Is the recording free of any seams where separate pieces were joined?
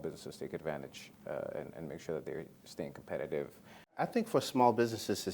no; 1 cut; at 4.0 s

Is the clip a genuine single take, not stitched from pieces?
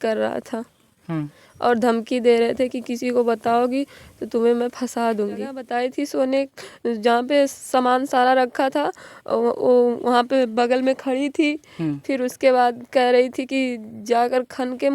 no; 1 cut; at 5.6 s

